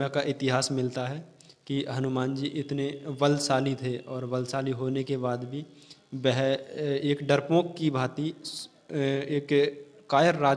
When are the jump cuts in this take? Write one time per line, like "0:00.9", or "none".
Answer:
none

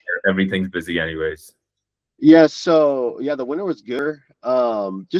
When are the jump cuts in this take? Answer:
0:04.0

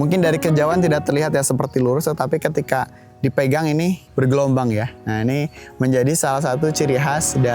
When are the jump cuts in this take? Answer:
0:04.0
0:05.0

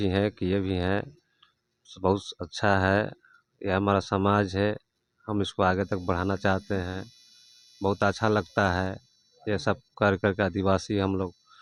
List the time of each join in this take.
none

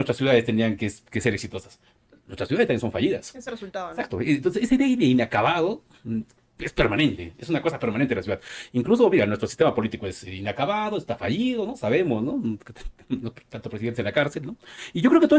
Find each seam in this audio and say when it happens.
none

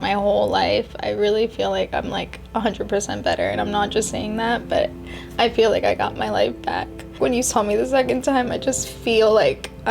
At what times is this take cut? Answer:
0:07.2

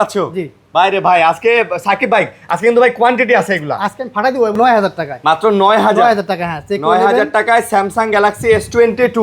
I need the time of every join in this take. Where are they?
0:04.6

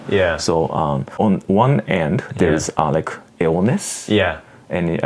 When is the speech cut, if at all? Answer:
0:01.1

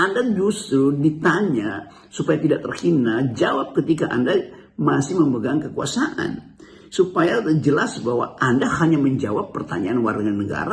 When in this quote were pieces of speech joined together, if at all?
none

